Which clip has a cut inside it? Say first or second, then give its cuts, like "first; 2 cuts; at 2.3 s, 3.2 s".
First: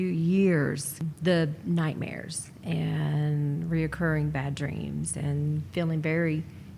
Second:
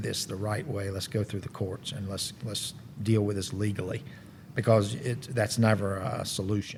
first; 1 cut; at 1.0 s